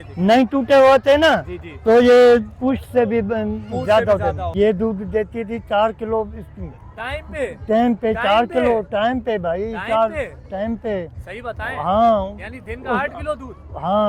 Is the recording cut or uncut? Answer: cut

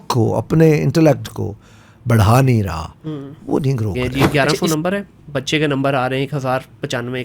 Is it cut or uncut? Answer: cut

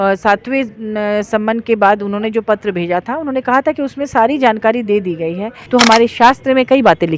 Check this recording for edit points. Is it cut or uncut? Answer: cut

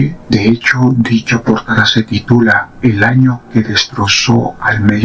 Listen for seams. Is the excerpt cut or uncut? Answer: uncut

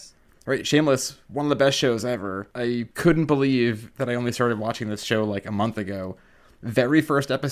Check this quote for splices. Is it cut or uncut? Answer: cut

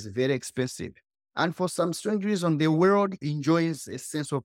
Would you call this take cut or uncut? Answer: uncut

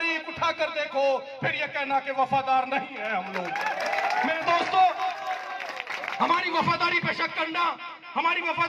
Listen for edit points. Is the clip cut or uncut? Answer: uncut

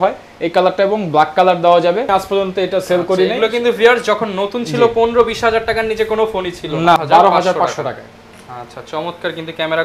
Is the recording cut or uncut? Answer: cut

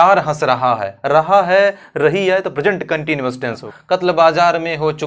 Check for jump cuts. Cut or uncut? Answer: cut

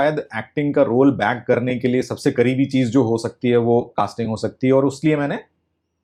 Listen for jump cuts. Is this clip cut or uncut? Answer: uncut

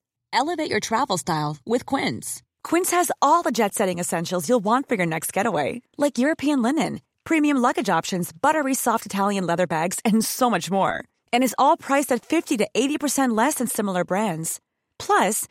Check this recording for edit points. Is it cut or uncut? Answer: uncut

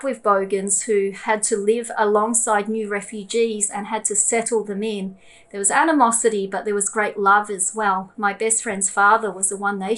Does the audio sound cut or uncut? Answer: uncut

